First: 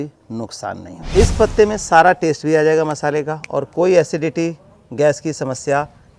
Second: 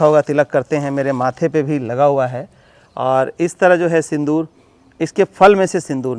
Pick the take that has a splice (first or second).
first